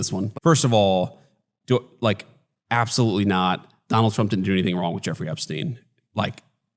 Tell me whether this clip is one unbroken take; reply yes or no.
no